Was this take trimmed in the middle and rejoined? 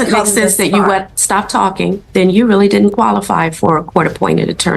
yes; 1 cut; at 2.0 s

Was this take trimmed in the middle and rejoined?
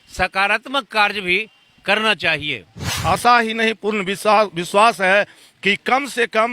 yes; 1 cut; at 2.9 s

